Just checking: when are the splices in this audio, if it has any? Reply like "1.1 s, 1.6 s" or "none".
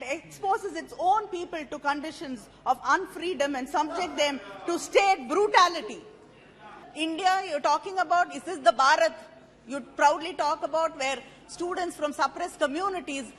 6.9 s